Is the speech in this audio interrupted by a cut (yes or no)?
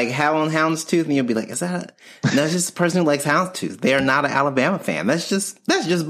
no